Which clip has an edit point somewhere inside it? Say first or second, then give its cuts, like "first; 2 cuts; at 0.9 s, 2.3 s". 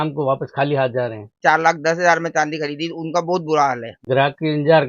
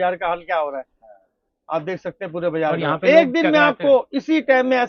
first; 2 cuts; at 1.3 s, 4.0 s